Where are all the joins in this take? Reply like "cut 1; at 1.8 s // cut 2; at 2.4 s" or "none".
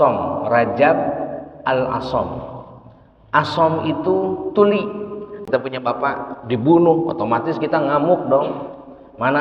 cut 1; at 5.4 s